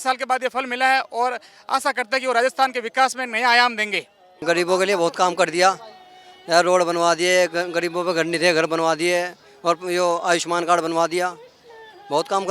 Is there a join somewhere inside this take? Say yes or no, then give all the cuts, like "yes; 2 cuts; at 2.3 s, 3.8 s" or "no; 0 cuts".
yes; 1 cut; at 4.4 s